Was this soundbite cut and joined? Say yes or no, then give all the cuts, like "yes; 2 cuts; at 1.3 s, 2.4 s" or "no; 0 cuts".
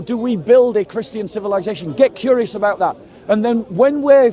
no; 0 cuts